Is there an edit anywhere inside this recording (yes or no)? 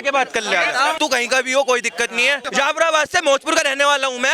yes